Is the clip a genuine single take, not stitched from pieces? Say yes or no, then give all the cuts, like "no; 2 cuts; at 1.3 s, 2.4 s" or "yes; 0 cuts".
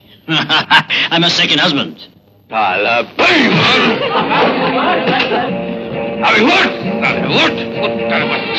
yes; 0 cuts